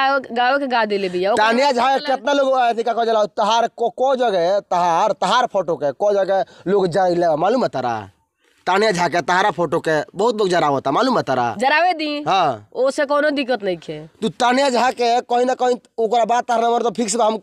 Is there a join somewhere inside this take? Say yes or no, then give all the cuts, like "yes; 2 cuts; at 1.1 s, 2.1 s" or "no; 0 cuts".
no; 0 cuts